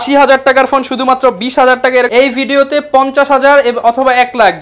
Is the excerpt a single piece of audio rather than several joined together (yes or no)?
no